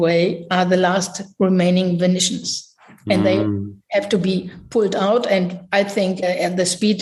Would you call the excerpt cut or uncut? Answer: uncut